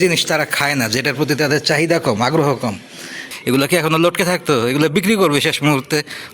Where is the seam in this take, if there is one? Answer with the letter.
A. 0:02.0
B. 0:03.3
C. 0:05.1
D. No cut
B